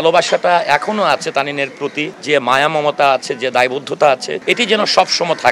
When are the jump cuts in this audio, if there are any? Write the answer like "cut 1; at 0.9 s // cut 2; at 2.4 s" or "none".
cut 1; at 2.1 s // cut 2; at 4.3 s